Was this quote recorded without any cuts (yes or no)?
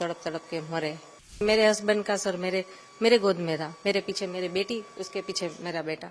no